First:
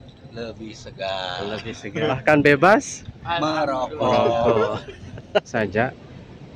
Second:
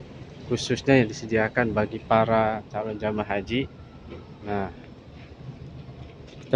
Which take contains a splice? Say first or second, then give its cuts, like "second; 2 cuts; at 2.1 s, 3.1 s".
first; 2 cuts; at 2.1 s, 5.5 s